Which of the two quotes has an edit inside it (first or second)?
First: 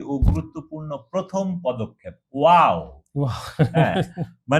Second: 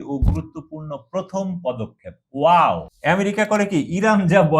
second